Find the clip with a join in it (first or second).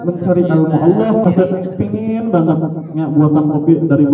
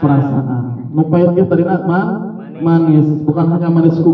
first